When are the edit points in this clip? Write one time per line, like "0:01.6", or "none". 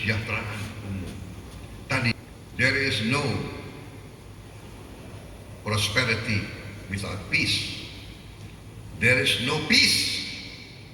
0:02.1